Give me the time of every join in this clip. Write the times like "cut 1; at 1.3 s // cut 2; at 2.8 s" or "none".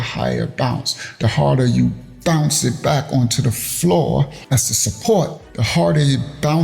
none